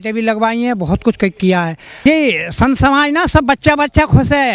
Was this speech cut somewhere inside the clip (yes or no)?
yes